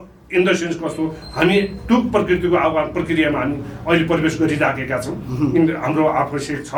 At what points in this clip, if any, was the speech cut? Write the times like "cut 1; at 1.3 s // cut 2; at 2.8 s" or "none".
none